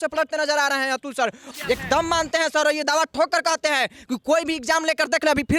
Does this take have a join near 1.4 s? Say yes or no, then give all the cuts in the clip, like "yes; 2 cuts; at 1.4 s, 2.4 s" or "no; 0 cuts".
yes; 1 cut; at 1.4 s